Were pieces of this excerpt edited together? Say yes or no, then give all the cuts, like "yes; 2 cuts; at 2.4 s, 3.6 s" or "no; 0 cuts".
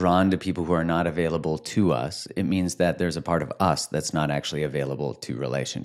no; 0 cuts